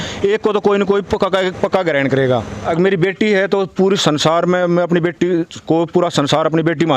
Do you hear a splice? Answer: yes; 1 cut; at 2.6 s

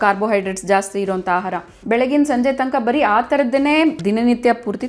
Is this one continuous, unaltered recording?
no; 2 cuts; at 1.7 s, 4.0 s

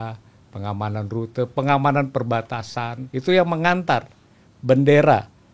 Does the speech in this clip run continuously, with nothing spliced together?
no; 1 cut; at 3.0 s

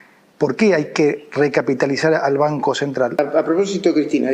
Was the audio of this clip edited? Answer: yes; 1 cut; at 3.2 s

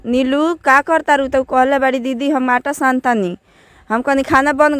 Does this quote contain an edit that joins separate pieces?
no; 0 cuts

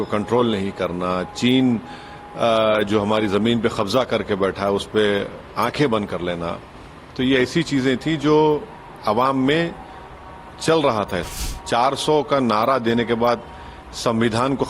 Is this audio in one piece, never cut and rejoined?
no; 1 cut; at 11.3 s

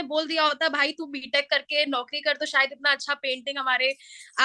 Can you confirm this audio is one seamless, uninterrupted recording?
yes; 0 cuts

